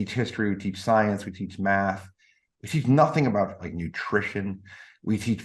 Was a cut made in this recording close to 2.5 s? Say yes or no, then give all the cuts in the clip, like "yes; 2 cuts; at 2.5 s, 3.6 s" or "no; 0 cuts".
no; 1 cut; at 3.7 s